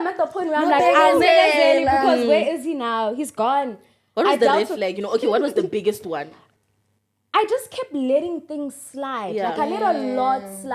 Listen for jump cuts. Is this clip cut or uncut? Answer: cut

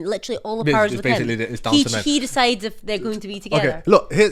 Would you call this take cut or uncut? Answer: uncut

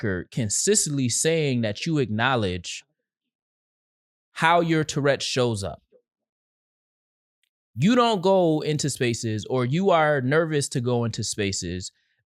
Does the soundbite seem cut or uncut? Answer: uncut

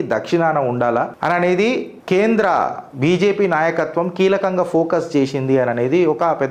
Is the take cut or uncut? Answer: cut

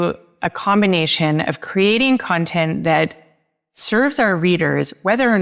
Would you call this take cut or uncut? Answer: uncut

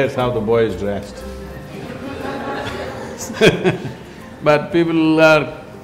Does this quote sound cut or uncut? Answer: uncut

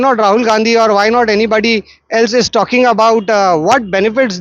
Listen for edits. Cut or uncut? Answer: uncut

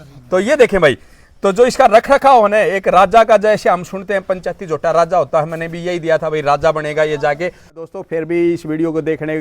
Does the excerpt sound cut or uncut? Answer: cut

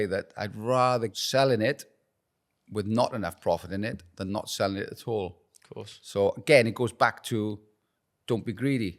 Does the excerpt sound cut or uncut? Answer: cut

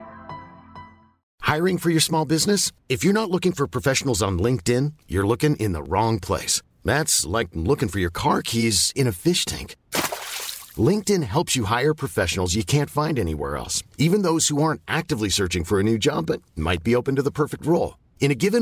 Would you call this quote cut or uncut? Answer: cut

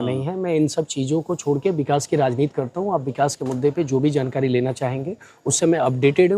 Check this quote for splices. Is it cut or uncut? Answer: uncut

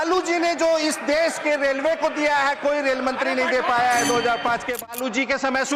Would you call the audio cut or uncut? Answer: cut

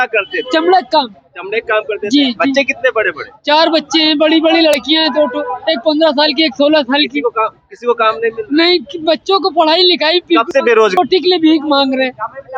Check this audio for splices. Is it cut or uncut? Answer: cut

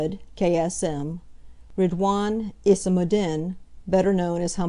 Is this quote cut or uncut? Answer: uncut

